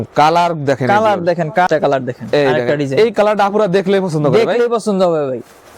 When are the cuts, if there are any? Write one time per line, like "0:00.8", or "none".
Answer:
0:01.7

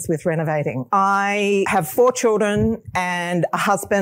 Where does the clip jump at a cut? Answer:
0:00.8
0:01.7

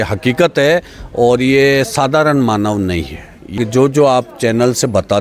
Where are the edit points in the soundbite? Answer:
0:03.5

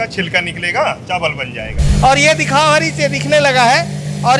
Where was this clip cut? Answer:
0:01.8

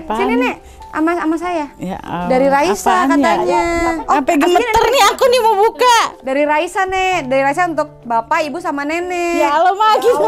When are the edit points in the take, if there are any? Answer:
none

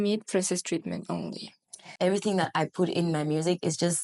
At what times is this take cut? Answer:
0:01.9

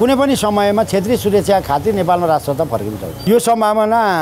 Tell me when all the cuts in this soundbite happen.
0:03.2

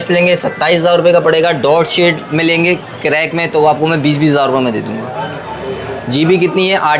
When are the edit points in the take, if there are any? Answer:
none

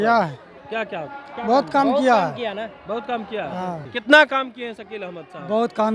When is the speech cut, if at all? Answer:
0:03.9

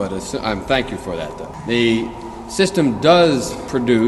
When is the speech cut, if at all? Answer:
0:01.5

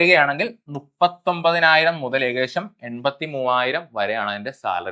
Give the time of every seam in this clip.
none

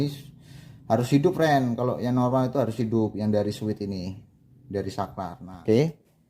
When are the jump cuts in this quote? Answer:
0:05.4

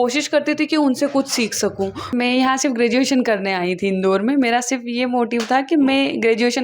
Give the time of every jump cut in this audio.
0:02.1

